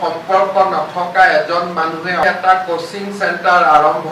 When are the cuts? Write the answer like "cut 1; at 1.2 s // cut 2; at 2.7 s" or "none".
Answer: cut 1; at 2.2 s